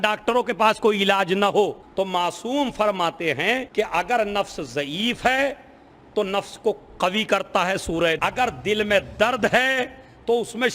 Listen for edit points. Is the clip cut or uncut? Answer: cut